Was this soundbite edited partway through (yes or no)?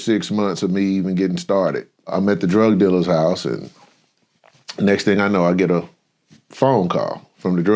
yes